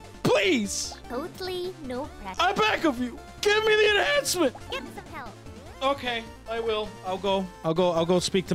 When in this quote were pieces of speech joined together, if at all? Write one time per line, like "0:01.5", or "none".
0:02.2
0:04.6
0:07.5